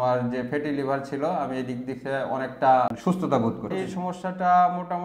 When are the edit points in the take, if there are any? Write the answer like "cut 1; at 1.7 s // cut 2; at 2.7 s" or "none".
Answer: cut 1; at 3.0 s // cut 2; at 3.7 s